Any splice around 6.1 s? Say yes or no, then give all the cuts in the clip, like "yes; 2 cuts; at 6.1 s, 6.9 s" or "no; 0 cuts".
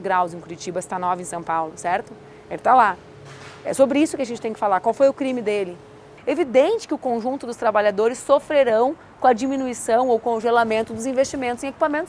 yes; 1 cut; at 6.1 s